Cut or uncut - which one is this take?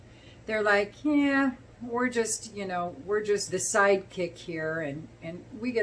cut